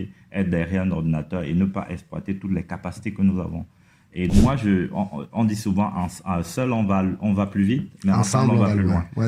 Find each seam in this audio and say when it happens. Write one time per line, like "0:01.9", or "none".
0:04.3